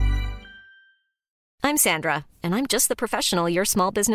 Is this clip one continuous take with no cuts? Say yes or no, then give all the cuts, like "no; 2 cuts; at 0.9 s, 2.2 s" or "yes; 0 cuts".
no; 1 cut; at 1.4 s